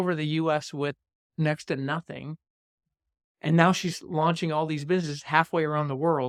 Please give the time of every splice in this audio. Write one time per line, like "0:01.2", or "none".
none